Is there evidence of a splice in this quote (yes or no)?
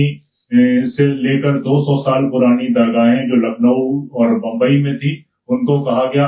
no